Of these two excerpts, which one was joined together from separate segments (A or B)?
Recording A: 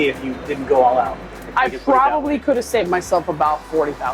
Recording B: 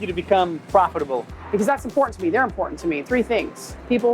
B